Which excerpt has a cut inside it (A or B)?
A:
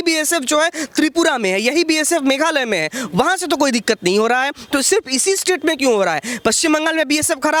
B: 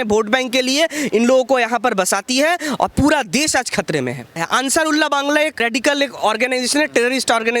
B